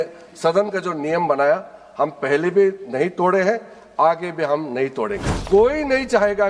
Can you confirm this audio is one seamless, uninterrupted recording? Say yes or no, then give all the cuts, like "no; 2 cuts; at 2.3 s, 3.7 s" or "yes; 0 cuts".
no; 1 cut; at 5.3 s